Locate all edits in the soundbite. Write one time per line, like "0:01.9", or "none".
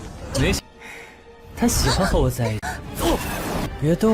none

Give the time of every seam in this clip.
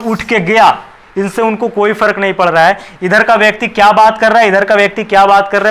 none

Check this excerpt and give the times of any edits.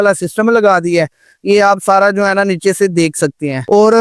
none

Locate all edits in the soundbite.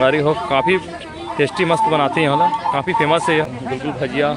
0:03.5

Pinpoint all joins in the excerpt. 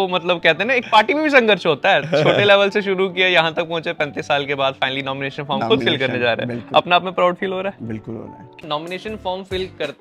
0:08.5

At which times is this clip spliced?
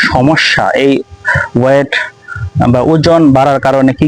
none

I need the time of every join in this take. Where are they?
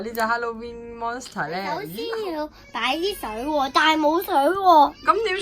0:01.9

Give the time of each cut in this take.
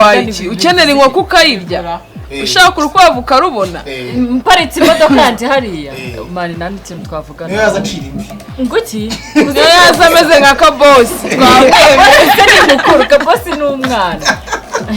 none

